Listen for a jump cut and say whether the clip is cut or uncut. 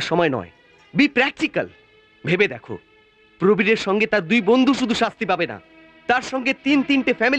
uncut